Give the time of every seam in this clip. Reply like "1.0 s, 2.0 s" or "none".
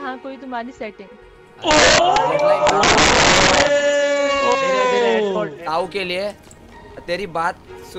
5.5 s, 6.5 s